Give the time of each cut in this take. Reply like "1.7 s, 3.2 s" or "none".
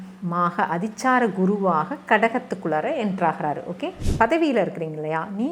4.0 s